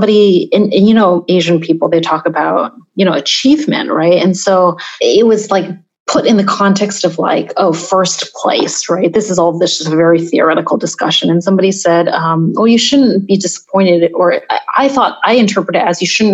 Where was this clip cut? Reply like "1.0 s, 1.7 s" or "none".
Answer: 1.2 s, 4.9 s